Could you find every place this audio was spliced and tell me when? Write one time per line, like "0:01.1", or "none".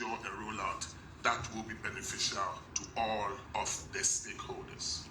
0:02.7
0:03.4

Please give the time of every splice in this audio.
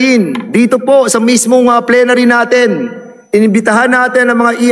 none

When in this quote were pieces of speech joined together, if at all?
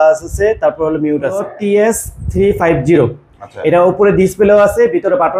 0:01.5

